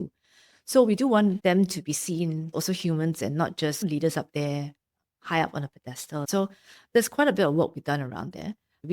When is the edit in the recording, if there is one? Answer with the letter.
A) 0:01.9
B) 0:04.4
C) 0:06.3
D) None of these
C